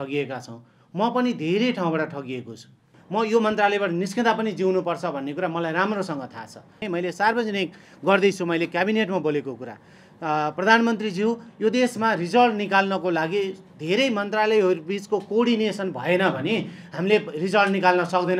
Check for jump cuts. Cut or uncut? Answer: cut